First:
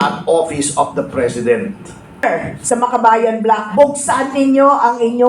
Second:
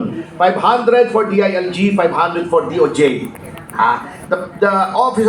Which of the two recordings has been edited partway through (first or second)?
first